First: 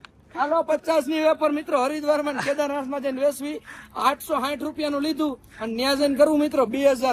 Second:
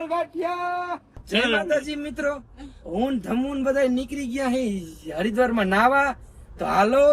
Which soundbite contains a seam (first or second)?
second